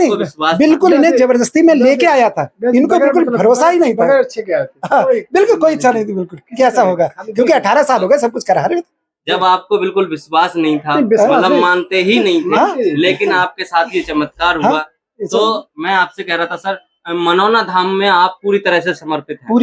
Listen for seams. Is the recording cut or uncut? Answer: uncut